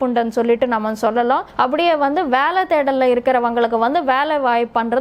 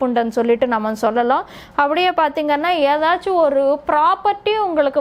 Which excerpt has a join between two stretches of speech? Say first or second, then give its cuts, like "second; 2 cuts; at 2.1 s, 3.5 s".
first; 1 cut; at 1.5 s